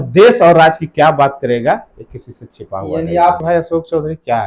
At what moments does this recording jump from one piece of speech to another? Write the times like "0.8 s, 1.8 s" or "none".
3.4 s